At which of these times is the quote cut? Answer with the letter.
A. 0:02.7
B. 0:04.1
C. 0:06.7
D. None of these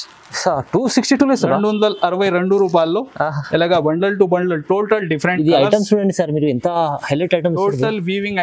D